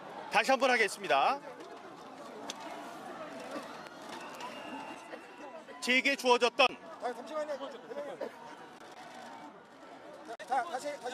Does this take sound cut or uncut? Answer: cut